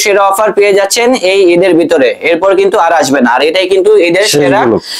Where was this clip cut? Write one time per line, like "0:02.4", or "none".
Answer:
none